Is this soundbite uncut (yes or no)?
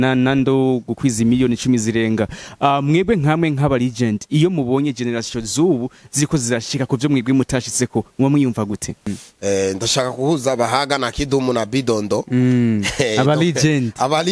no